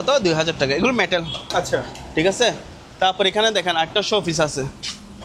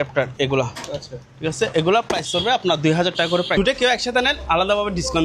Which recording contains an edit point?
second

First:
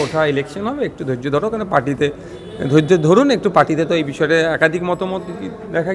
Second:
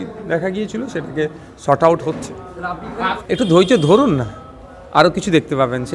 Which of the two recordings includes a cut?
second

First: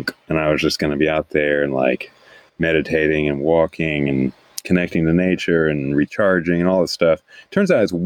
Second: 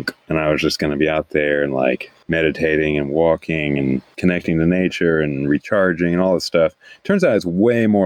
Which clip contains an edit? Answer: second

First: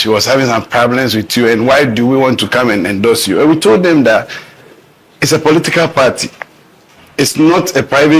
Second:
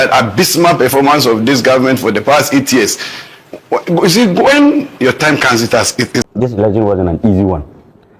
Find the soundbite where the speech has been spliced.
second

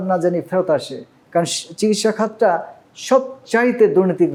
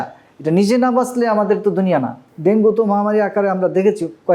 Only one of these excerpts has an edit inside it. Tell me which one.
second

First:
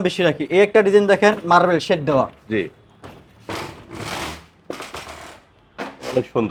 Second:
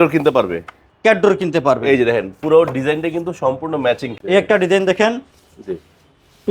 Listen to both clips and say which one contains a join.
second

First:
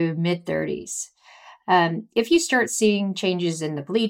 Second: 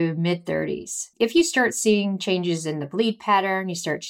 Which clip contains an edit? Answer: second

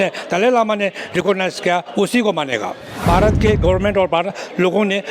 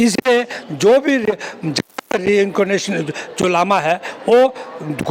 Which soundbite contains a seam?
first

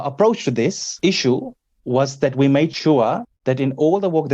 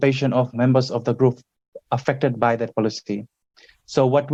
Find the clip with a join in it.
first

